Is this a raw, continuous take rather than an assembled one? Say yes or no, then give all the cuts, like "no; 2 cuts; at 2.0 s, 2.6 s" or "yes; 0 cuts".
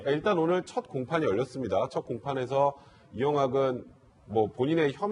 no; 1 cut; at 3.9 s